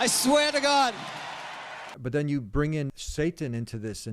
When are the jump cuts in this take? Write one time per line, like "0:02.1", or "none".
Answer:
0:01.9
0:03.0